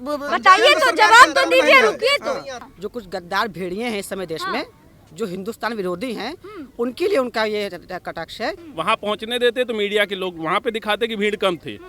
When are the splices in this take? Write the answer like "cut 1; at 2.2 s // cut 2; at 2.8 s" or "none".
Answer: cut 1; at 2.6 s // cut 2; at 8.6 s